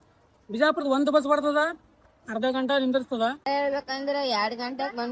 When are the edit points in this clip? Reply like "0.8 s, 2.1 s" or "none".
3.4 s